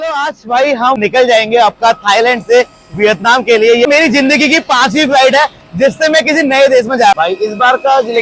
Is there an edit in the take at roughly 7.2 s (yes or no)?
yes